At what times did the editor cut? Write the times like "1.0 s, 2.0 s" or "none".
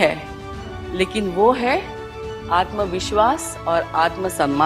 none